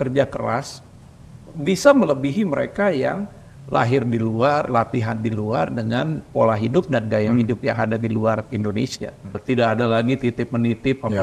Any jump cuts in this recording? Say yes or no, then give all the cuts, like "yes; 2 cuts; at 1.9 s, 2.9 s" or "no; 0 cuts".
yes; 1 cut; at 9.4 s